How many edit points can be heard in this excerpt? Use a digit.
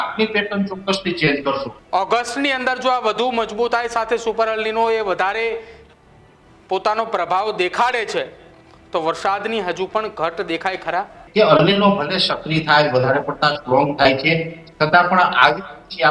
2